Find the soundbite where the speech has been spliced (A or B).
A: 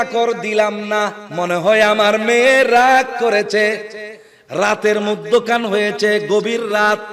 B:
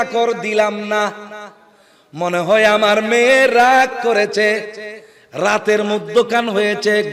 A